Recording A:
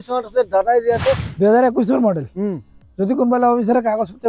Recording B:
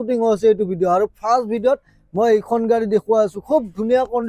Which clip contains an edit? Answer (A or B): A